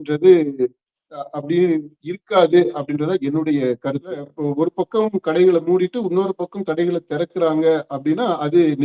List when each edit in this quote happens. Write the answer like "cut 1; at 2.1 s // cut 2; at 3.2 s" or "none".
cut 1; at 4.3 s